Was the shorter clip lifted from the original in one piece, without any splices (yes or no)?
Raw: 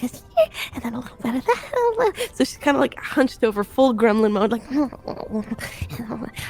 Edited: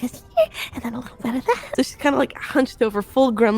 no